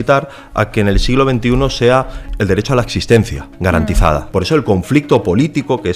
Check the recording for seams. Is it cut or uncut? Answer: cut